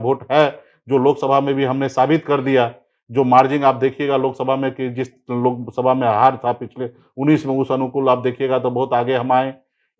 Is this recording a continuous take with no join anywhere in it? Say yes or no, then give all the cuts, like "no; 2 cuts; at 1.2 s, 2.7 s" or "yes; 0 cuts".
yes; 0 cuts